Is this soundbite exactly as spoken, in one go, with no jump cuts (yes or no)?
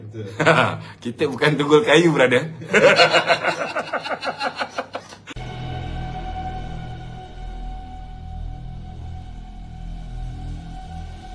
no